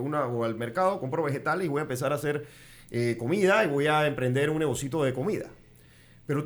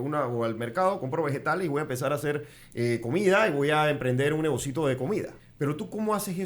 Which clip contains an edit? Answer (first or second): second